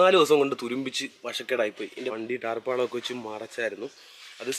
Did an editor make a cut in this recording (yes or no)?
yes